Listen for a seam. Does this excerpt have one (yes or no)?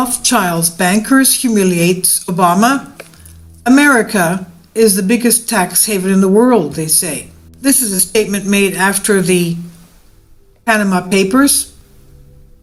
no